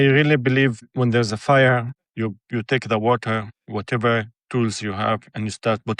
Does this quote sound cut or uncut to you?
cut